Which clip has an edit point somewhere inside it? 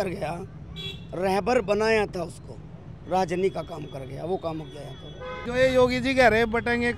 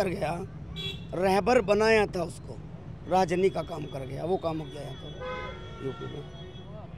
first; 1 cut; at 5.4 s

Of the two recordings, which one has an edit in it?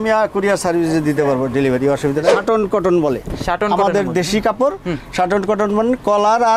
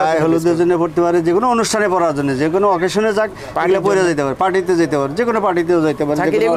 first; 1 cut; at 2.4 s

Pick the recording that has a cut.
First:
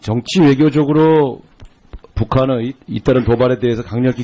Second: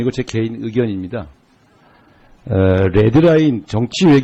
second; 1 cut; at 2.5 s

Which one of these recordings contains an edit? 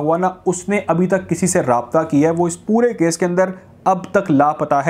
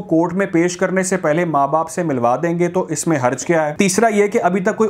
second; 1 cut; at 3.7 s

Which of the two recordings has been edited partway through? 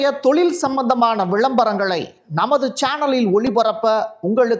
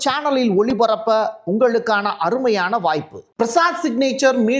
second; 1 cut; at 3.2 s

